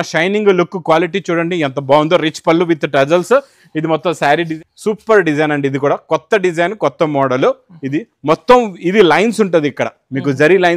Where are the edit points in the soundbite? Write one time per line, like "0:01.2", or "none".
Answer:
0:04.5